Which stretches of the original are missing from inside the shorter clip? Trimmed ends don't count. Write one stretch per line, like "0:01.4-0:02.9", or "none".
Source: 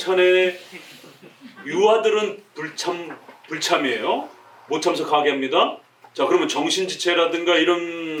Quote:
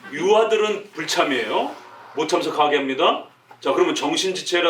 0:02.5-0:03.5